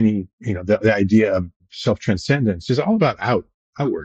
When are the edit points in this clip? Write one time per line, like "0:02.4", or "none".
0:01.6